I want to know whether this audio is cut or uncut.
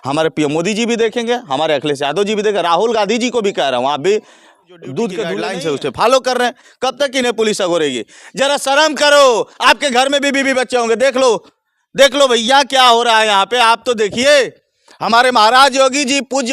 cut